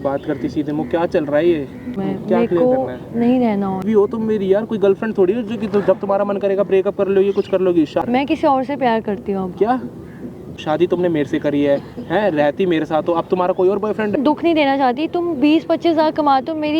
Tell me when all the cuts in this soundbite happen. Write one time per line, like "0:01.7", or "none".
0:01.9
0:03.8
0:08.0
0:10.6
0:14.2